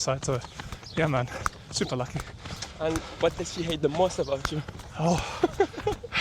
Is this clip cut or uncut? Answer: uncut